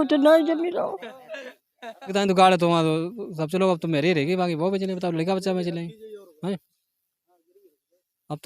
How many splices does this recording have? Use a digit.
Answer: 1